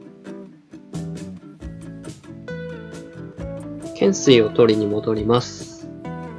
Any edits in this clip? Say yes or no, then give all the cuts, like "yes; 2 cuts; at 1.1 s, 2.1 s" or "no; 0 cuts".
yes; 1 cut; at 4.0 s